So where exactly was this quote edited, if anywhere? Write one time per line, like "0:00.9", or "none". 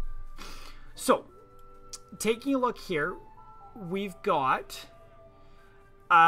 0:02.1